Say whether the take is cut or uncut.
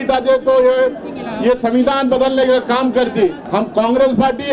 cut